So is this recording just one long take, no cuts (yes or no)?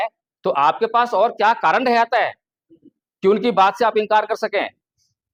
yes